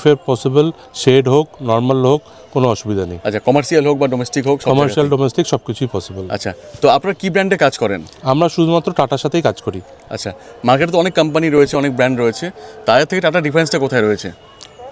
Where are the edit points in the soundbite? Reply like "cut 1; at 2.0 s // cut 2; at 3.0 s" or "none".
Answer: none